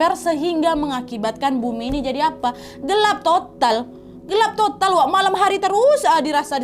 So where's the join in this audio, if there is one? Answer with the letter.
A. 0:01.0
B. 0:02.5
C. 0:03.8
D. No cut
D